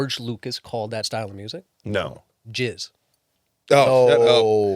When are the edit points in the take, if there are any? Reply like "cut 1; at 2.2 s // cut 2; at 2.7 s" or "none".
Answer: cut 1; at 1.1 s // cut 2; at 2.3 s

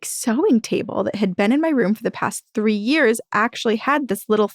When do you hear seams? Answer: none

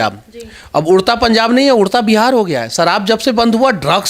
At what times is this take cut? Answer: none

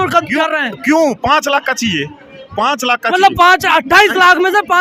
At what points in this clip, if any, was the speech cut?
none

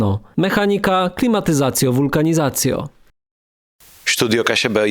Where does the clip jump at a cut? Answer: cut 1; at 3.4 s

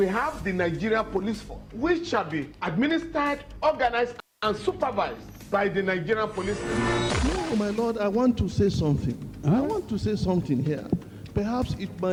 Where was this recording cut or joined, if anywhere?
none

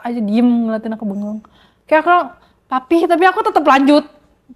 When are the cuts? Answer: none

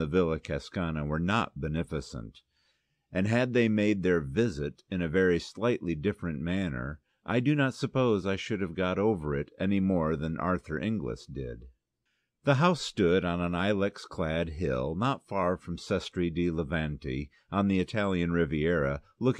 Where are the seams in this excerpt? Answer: cut 1; at 9.5 s

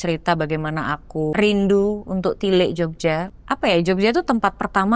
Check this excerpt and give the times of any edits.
cut 1; at 1.3 s // cut 2; at 3.3 s

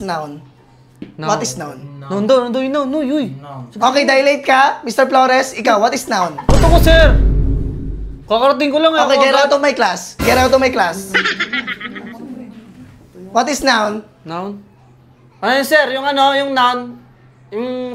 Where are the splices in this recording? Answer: none

